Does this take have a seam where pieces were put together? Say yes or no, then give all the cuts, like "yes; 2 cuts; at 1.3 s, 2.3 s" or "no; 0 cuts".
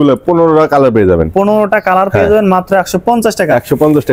no; 0 cuts